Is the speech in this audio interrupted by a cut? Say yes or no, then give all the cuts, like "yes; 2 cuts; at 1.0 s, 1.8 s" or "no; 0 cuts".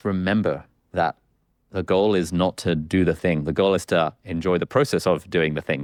no; 0 cuts